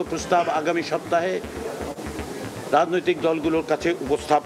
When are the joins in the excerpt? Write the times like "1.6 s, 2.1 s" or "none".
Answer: none